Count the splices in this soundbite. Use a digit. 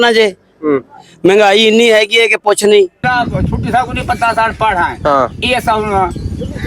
1